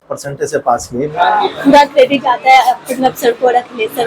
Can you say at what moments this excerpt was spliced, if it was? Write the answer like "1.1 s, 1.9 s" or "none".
1.1 s